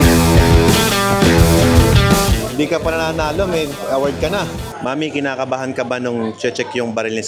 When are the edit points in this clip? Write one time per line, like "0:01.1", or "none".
0:04.6